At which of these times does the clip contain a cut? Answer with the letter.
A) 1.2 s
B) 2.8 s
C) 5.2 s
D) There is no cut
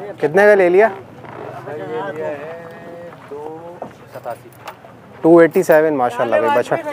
D